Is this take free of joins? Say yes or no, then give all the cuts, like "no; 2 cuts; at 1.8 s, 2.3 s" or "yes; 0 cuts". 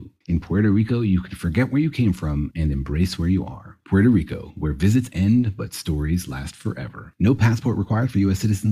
yes; 0 cuts